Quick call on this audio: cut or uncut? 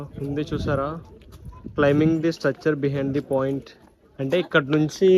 uncut